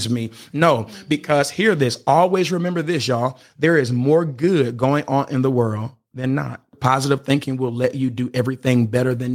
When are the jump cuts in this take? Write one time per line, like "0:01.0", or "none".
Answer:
0:03.4
0:06.7